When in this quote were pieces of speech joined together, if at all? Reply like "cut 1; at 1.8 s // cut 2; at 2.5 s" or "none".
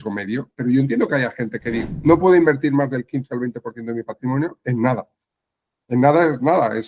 cut 1; at 1.7 s